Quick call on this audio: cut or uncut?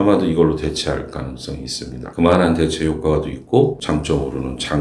uncut